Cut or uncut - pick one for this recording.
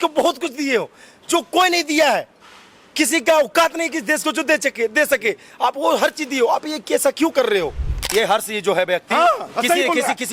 cut